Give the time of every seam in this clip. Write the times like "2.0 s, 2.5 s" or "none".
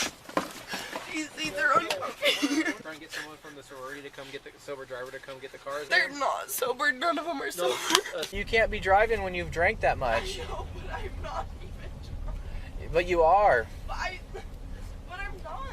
2.8 s, 5.9 s, 8.3 s